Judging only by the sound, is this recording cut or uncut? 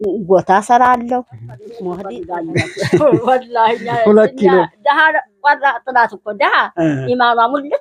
cut